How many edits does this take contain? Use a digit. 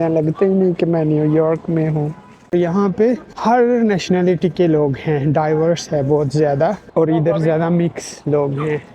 2